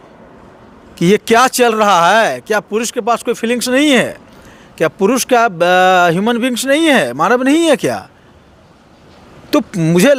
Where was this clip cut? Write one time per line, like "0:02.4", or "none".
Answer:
none